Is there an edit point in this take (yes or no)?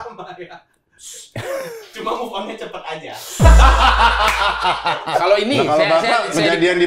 yes